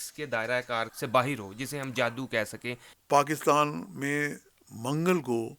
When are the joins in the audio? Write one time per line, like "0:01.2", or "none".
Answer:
0:00.9
0:02.9